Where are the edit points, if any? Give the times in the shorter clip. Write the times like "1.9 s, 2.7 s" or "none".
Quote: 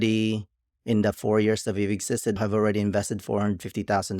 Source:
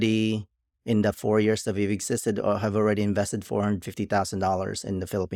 2.4 s